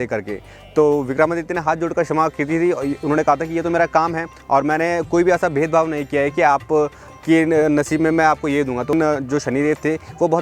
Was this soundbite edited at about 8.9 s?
yes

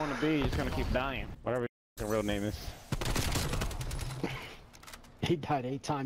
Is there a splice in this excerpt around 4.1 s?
no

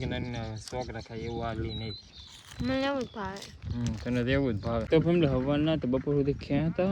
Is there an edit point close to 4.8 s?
yes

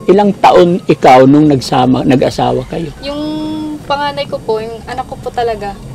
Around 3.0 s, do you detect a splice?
yes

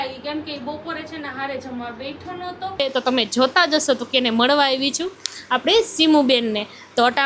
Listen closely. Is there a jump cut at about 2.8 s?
yes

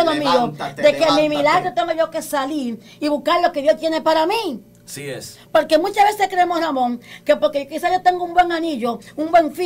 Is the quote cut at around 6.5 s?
no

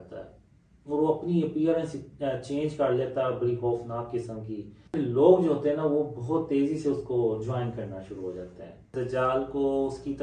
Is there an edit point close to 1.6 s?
no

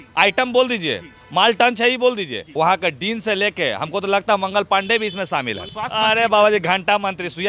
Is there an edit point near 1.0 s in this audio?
no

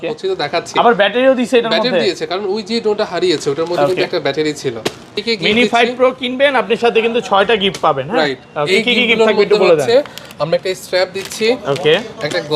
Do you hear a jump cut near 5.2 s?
yes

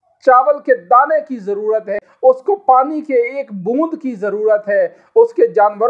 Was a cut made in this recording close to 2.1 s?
yes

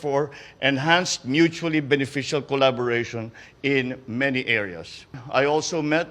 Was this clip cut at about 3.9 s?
no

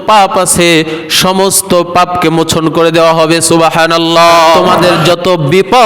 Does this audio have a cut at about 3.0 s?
no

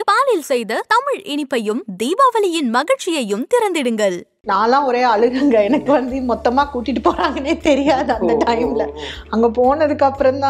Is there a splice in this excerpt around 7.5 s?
no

